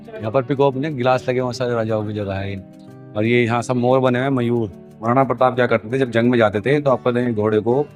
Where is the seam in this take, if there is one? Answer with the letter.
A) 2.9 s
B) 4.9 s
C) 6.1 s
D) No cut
B